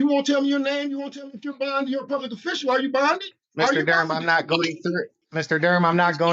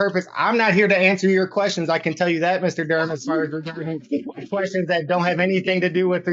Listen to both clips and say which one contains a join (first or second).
first